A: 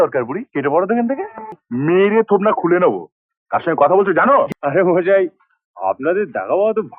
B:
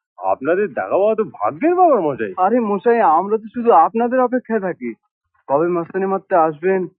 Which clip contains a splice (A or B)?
A